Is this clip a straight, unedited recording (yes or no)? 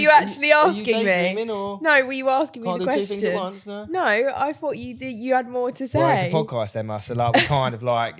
yes